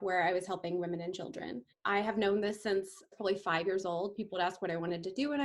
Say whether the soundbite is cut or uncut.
cut